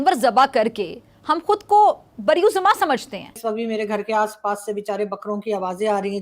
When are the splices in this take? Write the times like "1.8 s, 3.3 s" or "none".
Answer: 3.4 s